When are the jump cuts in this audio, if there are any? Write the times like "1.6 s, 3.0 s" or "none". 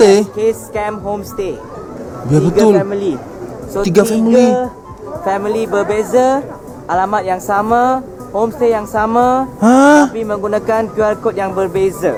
none